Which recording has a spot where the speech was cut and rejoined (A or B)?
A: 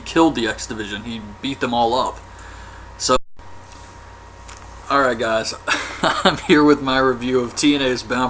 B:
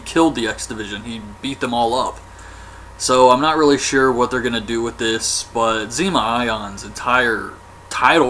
B